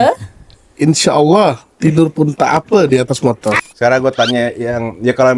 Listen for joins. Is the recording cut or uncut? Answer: cut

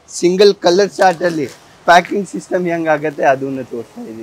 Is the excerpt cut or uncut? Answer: uncut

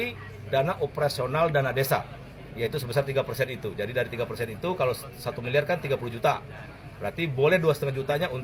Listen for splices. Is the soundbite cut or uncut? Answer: uncut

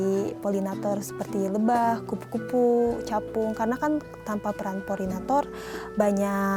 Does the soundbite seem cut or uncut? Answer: uncut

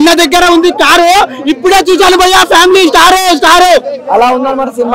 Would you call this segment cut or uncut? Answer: uncut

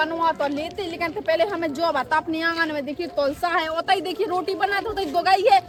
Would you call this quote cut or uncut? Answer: uncut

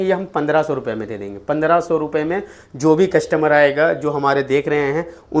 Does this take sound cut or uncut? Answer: uncut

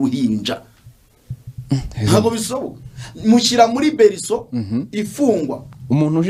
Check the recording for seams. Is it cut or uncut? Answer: uncut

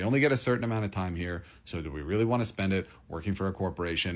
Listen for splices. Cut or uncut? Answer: uncut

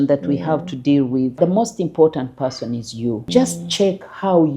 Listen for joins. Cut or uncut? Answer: cut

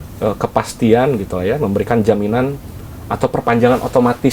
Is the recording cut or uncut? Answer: uncut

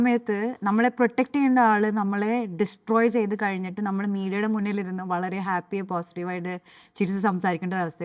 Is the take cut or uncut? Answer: uncut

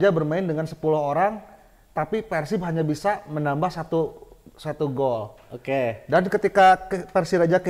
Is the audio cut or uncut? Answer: uncut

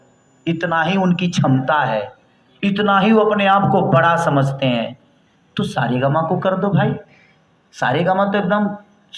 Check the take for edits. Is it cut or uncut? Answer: uncut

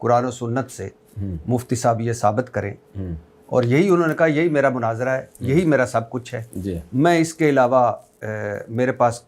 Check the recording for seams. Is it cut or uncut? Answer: uncut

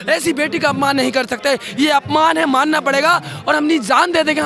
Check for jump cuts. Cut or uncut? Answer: uncut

